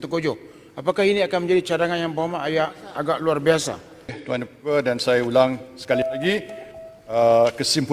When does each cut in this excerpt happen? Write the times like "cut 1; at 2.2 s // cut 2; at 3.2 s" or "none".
cut 1; at 4.2 s